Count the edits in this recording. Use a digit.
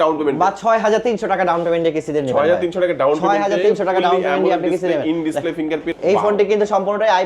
1